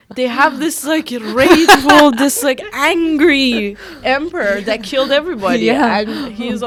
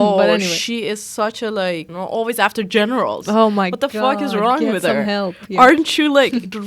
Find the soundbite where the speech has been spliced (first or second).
second